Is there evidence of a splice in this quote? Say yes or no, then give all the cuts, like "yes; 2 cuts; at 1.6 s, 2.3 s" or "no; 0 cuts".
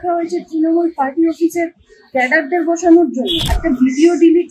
yes; 1 cut; at 3.4 s